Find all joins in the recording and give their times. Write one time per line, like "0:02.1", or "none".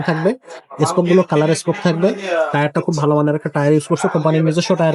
none